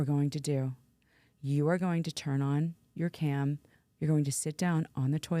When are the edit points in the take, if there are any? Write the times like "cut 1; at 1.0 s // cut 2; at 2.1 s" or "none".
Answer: cut 1; at 3.7 s